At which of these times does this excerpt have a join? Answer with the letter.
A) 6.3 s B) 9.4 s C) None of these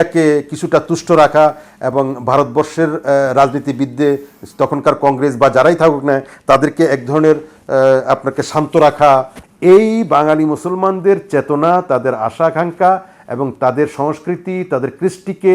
B